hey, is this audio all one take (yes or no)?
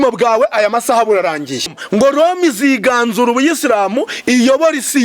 no